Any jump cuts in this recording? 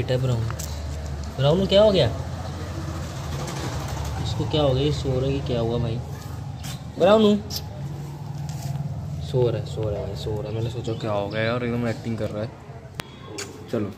yes; 1 cut; at 12.8 s

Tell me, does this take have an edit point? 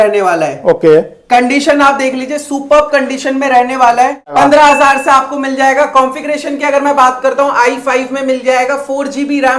yes; 1 cut; at 4.3 s

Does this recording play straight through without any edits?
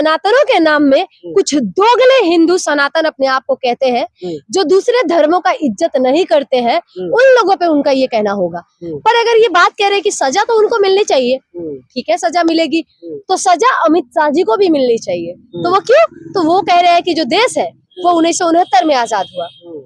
yes; 0 cuts

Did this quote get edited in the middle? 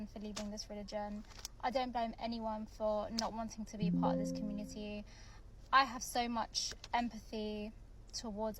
yes; 1 cut; at 2.1 s

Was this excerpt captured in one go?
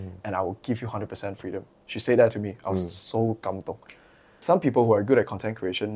no; 1 cut; at 4.3 s

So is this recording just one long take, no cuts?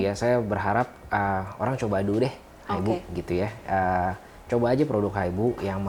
yes; 0 cuts

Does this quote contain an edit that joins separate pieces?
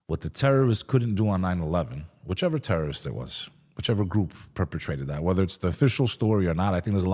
no; 0 cuts

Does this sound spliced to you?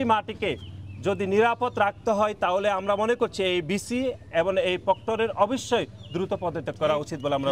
no; 0 cuts

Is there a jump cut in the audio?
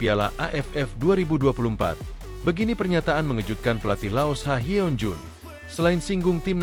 no; 0 cuts

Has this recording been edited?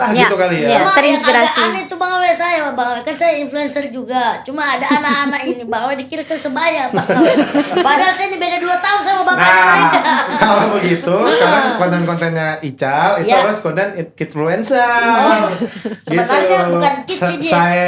no; 0 cuts

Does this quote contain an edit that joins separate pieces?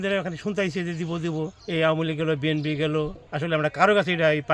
yes; 2 cuts; at 1.6 s, 3.2 s

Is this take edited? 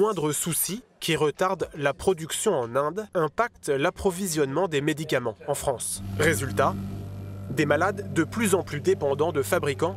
yes; 2 cuts; at 3.0 s, 6.0 s

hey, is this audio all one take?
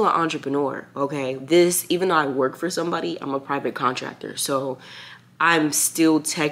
yes; 0 cuts

